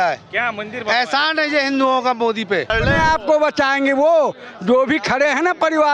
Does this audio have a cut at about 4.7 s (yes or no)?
no